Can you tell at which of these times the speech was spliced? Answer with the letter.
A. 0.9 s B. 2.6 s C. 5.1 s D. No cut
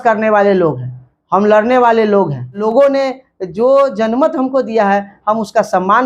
B